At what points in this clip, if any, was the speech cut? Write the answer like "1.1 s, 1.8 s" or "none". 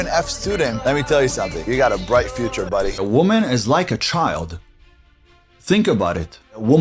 2.9 s